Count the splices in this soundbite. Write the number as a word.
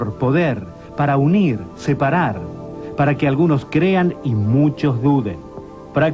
one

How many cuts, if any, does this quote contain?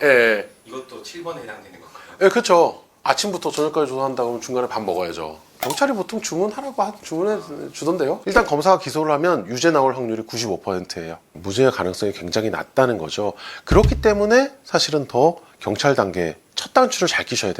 three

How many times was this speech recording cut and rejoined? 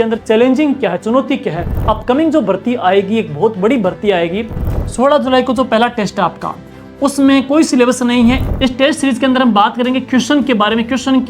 three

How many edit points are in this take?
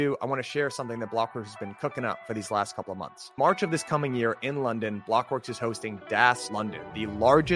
one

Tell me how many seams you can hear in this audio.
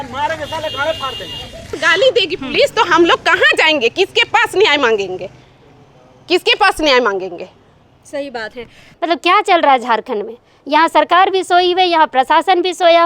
two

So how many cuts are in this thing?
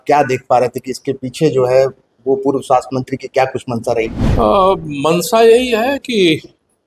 one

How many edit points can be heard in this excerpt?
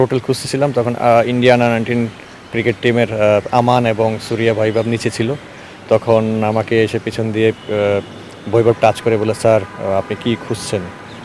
zero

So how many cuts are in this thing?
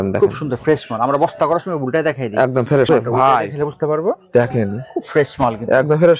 one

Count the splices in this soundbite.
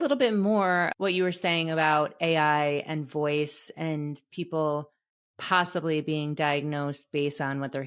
one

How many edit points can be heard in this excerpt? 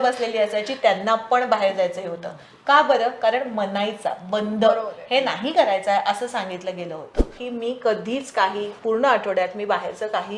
one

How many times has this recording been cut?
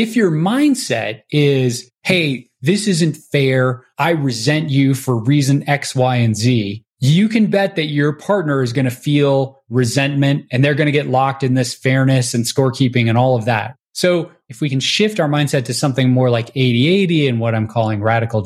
two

